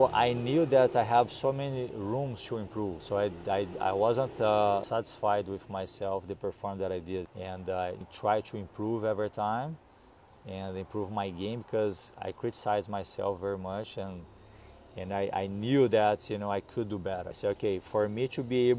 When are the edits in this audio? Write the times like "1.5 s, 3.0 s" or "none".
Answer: 3.0 s, 4.8 s, 7.6 s, 17.3 s